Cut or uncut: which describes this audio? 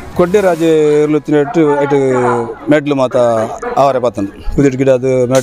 uncut